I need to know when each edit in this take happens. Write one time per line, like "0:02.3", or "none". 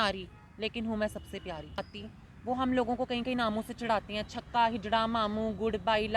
0:01.8